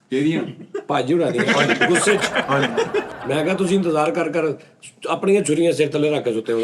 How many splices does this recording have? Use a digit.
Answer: 1